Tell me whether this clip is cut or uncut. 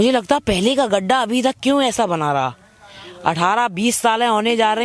uncut